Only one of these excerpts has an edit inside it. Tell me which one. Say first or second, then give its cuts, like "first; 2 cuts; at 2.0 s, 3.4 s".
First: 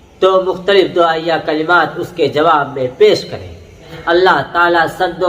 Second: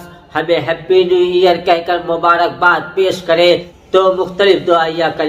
first; 1 cut; at 3.9 s